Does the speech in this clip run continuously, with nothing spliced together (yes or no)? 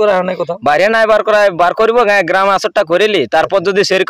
yes